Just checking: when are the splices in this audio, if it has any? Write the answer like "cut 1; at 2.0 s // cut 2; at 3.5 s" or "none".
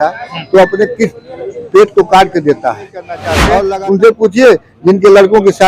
cut 1; at 3.5 s